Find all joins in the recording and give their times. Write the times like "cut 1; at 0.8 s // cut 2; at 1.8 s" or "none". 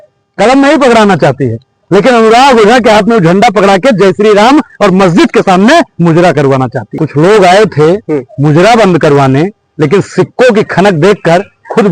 cut 1; at 6.8 s